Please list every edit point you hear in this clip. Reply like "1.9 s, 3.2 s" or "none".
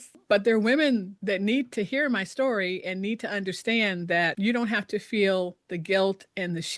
none